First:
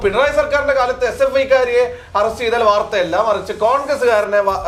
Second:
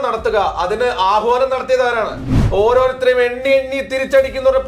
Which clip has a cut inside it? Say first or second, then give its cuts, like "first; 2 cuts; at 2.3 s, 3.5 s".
second; 1 cut; at 2.3 s